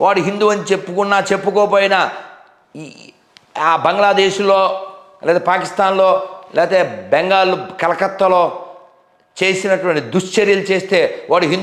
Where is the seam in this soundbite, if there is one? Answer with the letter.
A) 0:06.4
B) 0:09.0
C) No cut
C